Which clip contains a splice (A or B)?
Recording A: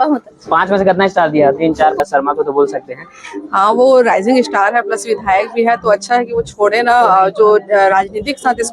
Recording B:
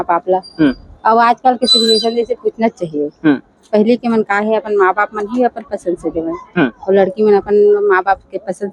A